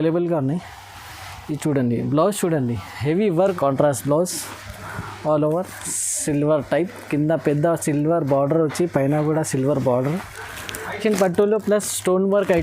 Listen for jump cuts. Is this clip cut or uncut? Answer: cut